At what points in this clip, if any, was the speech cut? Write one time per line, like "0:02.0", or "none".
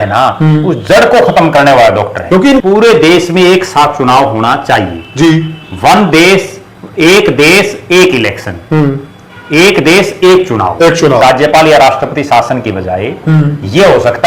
0:02.6
0:11.2

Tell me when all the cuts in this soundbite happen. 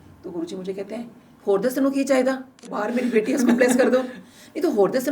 0:02.8

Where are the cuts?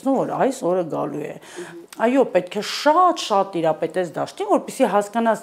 none

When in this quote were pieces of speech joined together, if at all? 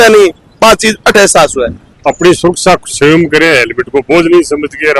0:01.8

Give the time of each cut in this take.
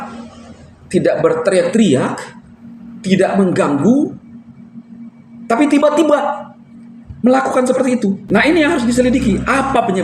0:08.2

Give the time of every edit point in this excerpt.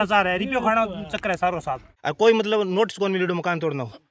0:02.0

